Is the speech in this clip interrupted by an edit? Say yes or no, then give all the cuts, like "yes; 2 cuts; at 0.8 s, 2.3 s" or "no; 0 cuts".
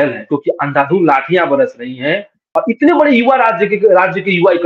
yes; 1 cut; at 2.4 s